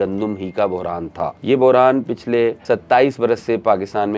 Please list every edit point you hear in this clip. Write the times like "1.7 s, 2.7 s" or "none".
1.4 s, 2.6 s